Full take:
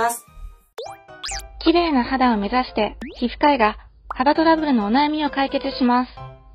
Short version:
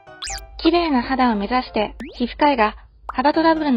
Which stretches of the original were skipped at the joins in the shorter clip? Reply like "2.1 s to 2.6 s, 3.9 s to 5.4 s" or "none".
none